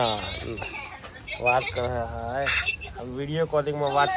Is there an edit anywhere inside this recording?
no; 0 cuts

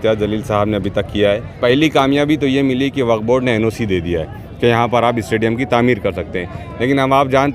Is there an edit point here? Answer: yes; 1 cut; at 1.6 s

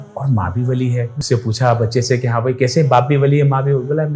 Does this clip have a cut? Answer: yes; 1 cut; at 1.2 s

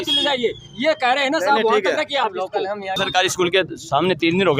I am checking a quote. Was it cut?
yes; 1 cut; at 3.0 s

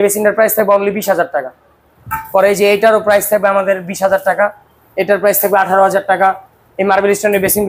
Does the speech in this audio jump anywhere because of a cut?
no; 0 cuts

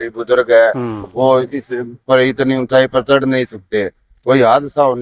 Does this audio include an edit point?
no; 0 cuts

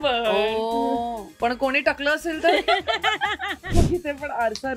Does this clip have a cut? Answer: yes; 1 cut; at 3.7 s

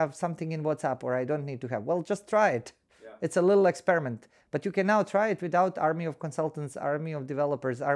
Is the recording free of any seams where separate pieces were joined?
yes; 0 cuts

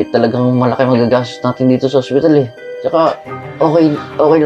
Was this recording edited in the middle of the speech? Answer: no; 0 cuts

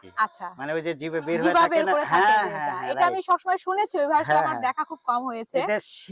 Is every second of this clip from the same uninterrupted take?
yes; 0 cuts

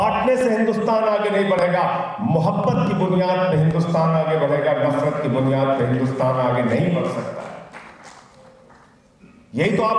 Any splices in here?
no; 0 cuts

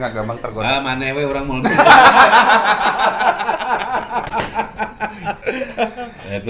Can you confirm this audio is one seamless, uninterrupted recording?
yes; 0 cuts

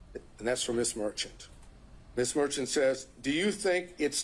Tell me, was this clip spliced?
no; 0 cuts

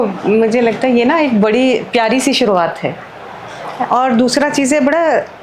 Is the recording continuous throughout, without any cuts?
yes; 0 cuts

